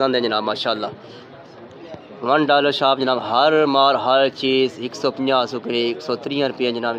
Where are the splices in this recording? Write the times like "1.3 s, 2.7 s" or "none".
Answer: none